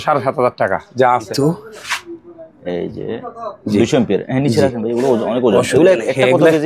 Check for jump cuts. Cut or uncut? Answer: cut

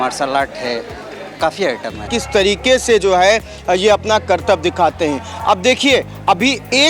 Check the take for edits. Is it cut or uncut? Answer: cut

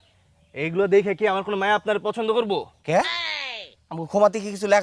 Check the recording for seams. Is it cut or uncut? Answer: uncut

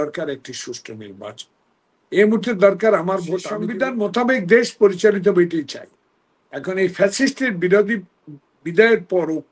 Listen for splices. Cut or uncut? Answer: cut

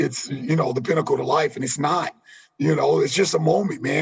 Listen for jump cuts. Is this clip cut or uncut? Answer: uncut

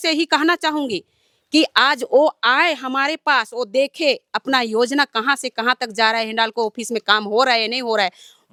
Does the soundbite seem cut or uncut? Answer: uncut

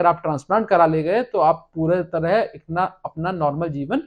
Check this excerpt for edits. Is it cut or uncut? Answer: uncut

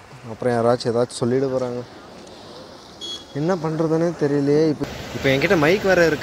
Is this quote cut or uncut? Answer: cut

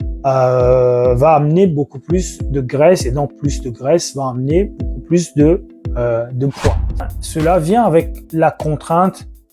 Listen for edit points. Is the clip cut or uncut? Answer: cut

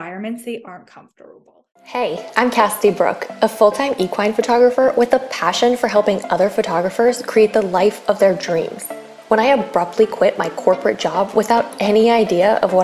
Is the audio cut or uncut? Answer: cut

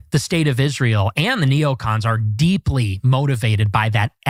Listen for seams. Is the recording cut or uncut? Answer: uncut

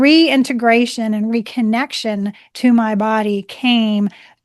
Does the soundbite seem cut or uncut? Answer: uncut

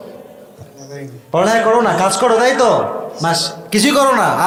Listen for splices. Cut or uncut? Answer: uncut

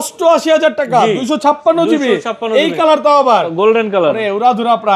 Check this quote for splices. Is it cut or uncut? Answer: uncut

